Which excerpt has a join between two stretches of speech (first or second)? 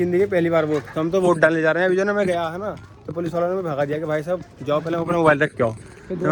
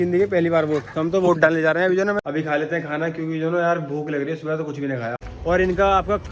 second